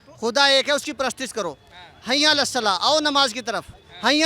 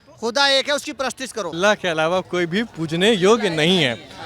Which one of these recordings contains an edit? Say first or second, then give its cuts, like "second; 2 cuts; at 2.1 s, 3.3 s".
second; 1 cut; at 1.5 s